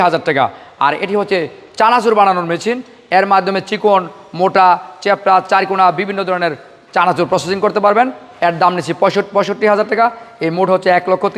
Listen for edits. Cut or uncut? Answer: uncut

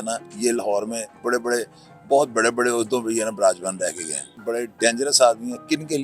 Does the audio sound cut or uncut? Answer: cut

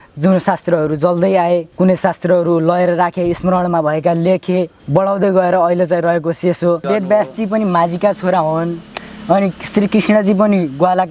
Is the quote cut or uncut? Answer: cut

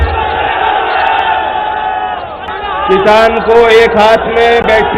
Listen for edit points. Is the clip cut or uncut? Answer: cut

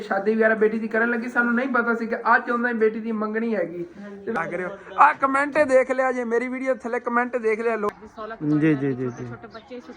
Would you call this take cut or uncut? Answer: cut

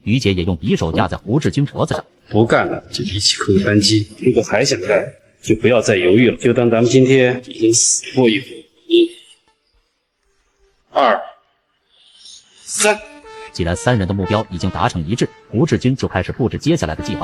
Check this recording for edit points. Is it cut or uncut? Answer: uncut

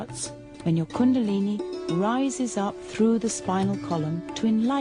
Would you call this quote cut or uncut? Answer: cut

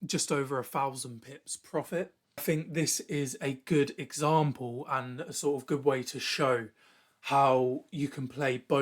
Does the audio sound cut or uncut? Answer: cut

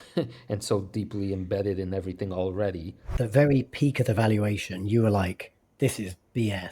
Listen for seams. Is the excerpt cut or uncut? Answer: cut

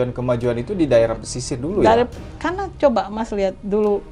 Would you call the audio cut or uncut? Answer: uncut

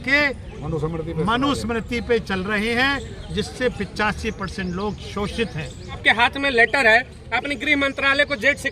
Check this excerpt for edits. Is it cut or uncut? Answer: cut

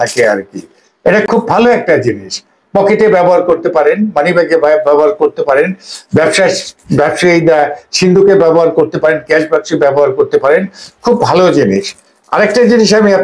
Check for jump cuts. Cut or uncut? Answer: uncut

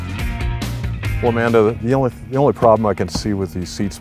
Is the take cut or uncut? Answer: uncut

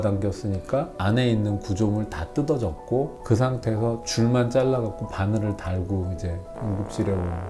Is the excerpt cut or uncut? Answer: cut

